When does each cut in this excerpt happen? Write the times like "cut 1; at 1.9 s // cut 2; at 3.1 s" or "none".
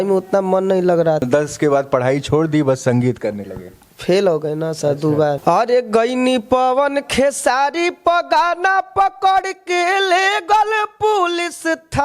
cut 1; at 1.2 s // cut 2; at 5.4 s